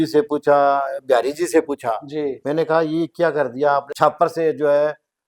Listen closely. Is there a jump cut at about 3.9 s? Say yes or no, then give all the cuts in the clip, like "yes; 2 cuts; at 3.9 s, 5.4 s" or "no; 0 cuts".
yes; 1 cut; at 3.9 s